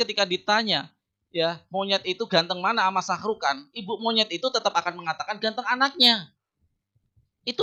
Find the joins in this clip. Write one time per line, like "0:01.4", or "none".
none